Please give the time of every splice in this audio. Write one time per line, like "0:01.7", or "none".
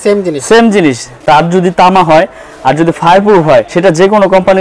0:01.1
0:03.7